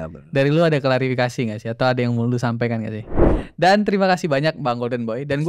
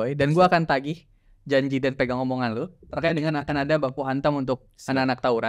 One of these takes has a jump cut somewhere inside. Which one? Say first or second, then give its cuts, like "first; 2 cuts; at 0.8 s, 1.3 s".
first; 1 cut; at 3.4 s